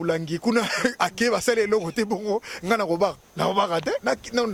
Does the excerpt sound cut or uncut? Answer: uncut